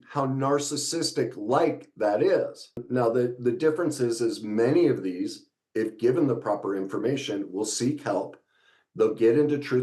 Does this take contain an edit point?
yes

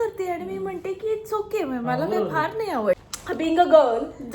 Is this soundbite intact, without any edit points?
no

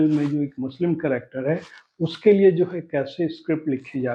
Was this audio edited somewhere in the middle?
no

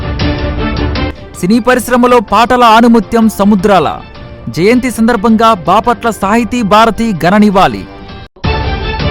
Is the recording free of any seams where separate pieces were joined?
no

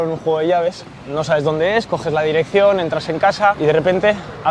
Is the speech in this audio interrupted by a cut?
yes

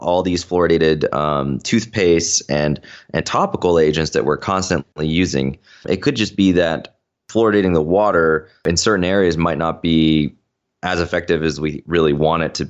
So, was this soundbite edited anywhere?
yes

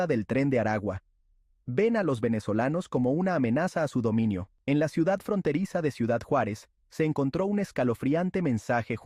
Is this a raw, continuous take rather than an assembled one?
no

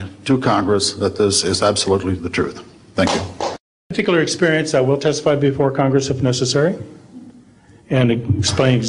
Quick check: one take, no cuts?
no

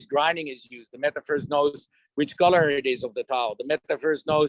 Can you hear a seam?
no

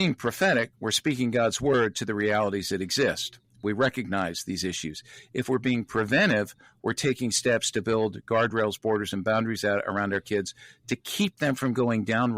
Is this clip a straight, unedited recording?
yes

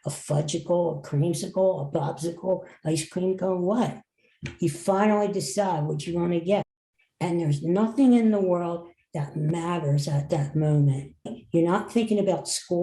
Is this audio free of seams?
no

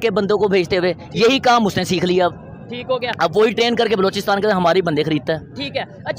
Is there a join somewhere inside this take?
no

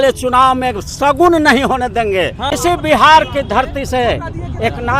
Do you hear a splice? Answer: yes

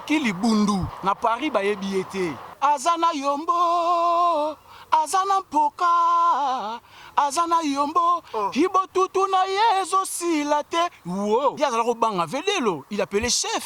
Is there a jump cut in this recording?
yes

